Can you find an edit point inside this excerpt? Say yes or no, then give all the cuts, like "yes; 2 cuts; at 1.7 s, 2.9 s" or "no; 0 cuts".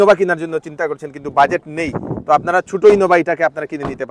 no; 0 cuts